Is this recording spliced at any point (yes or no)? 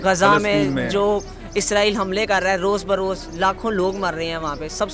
no